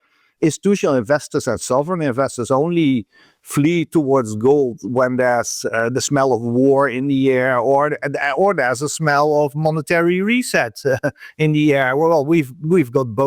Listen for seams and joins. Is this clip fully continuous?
yes; 0 cuts

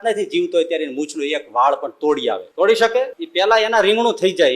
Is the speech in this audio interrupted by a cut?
yes; 2 cuts; at 2.5 s, 3.2 s

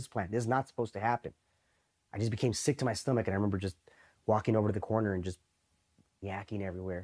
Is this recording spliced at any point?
yes; 1 cut; at 6.1 s

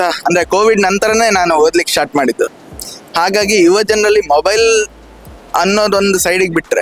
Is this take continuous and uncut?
yes; 0 cuts

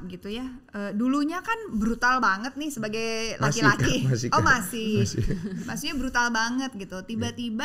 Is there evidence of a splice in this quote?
no; 0 cuts

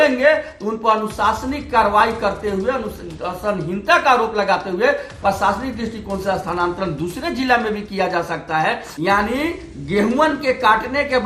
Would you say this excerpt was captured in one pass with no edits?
no; 1 cut; at 8.9 s

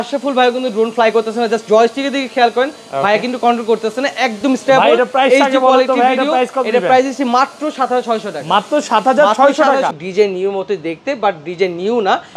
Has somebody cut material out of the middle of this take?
yes; 1 cut; at 9.9 s

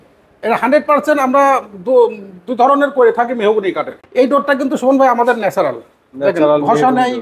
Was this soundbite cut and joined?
yes; 1 cut; at 4.0 s

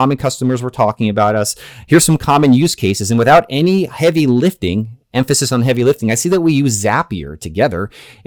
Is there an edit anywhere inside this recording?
no; 0 cuts

